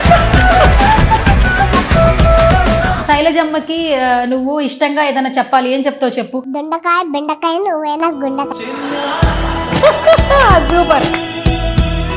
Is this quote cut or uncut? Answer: cut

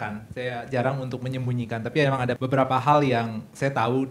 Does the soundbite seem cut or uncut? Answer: uncut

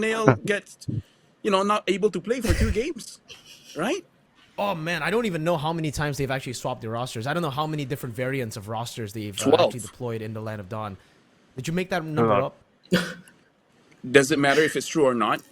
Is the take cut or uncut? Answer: cut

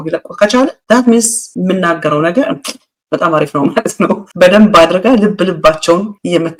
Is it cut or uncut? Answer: uncut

